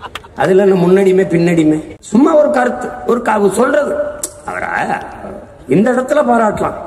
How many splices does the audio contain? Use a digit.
0